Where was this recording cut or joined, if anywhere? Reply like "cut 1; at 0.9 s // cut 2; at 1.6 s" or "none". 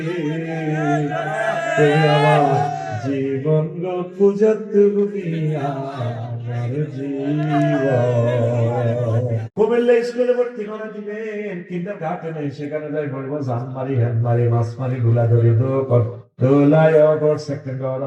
cut 1; at 9.4 s